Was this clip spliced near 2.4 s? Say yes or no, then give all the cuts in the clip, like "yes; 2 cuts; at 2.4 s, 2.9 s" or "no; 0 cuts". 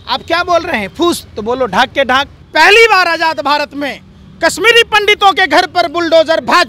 yes; 1 cut; at 2.4 s